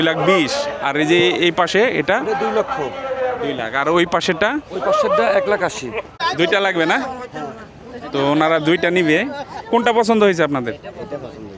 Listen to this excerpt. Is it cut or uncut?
cut